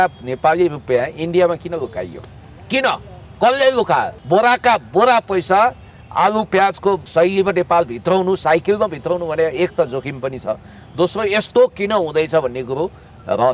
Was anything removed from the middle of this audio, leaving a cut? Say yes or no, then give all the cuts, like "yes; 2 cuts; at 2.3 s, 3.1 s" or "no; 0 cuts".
yes; 2 cuts; at 4.1 s, 7.1 s